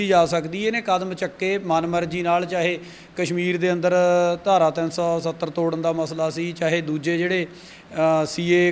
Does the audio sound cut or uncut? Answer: uncut